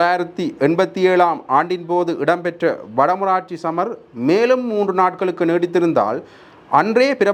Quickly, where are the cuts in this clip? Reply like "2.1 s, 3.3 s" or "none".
none